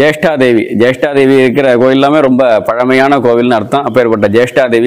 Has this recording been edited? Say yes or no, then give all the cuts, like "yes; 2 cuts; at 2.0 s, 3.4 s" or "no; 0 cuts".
no; 0 cuts